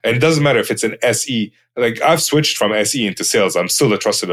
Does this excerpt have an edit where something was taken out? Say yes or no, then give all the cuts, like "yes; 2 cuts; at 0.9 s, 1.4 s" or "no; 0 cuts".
no; 0 cuts